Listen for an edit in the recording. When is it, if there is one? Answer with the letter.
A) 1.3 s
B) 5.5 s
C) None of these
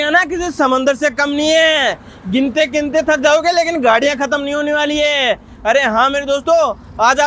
C